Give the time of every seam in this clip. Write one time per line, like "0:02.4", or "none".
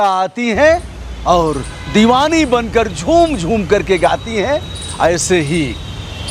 none